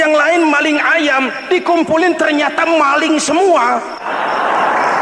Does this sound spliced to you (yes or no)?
yes